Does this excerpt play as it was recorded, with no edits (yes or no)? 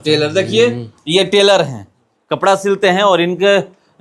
yes